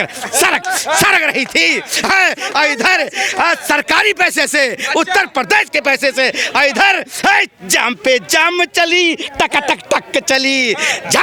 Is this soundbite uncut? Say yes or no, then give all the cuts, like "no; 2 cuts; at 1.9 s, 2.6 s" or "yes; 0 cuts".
yes; 0 cuts